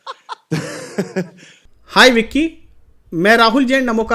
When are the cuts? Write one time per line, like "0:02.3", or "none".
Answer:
0:01.8